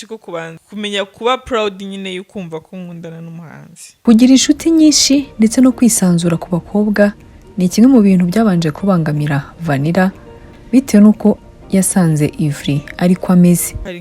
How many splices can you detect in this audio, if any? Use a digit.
1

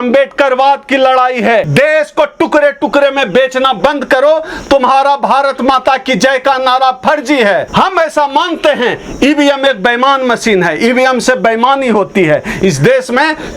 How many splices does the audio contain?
2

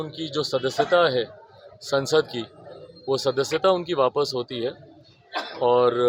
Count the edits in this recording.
0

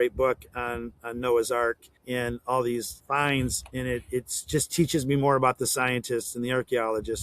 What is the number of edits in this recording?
2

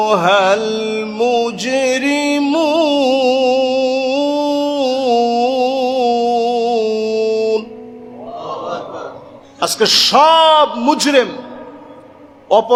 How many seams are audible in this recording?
0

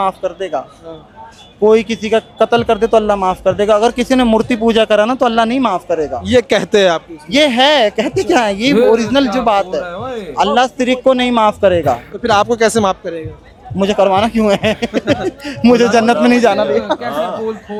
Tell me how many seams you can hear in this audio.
0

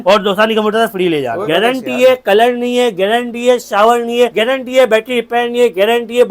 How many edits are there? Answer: 2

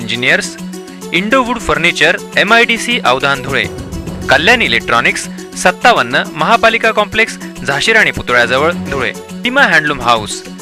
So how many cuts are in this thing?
1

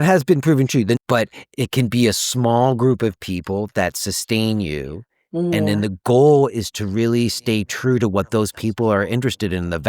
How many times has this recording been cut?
1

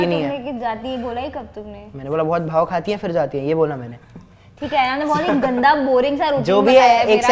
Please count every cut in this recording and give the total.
0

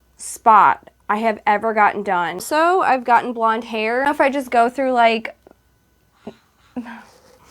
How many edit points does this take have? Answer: 2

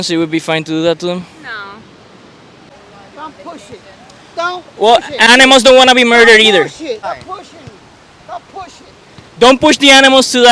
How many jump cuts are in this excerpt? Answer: 3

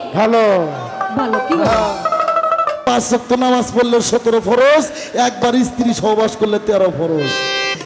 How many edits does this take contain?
1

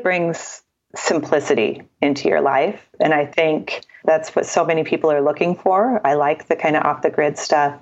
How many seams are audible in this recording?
1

